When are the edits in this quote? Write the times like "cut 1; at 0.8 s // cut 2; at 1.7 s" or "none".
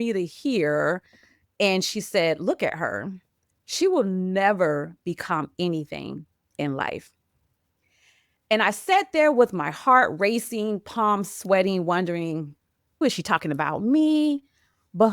cut 1; at 13.0 s